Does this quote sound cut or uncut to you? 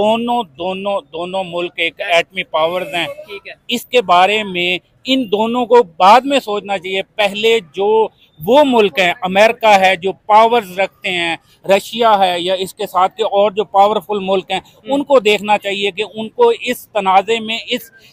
uncut